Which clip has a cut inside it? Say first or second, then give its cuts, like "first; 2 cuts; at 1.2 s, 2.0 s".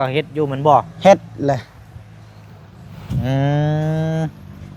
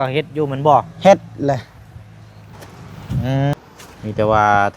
second; 1 cut; at 3.5 s